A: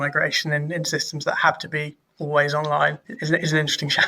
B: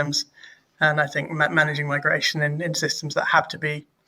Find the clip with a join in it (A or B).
A